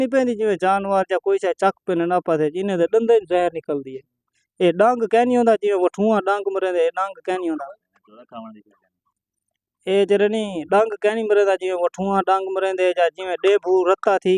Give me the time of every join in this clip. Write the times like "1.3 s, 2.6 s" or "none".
none